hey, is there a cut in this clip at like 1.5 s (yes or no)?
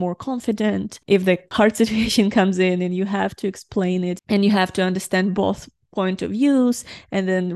yes